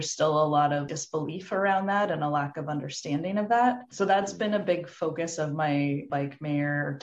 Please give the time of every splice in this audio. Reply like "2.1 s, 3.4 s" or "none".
none